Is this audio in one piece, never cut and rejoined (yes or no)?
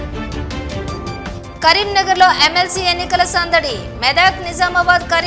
yes